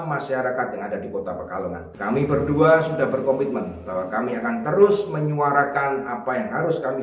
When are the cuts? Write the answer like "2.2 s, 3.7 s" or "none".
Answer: 1.9 s